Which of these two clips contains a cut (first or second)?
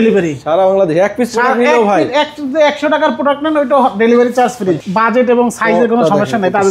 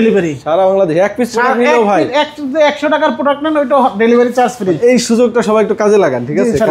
first